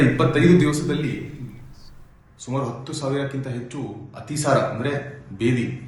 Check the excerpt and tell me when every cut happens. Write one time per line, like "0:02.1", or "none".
0:03.2